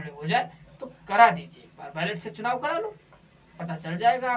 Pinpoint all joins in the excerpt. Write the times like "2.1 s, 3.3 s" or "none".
none